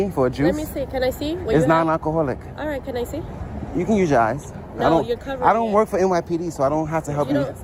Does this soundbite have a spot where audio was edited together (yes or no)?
no